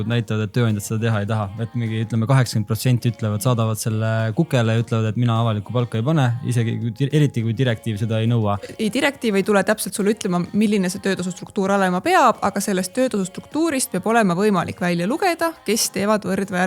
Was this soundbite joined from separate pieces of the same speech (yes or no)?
yes